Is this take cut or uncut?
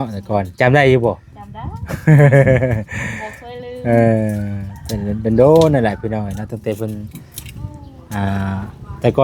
uncut